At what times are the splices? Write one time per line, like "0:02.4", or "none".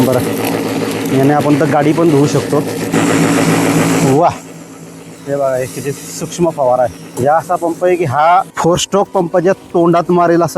0:02.9
0:07.1
0:08.5

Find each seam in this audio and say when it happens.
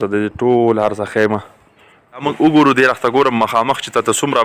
0:02.2

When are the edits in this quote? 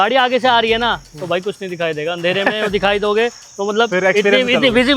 none

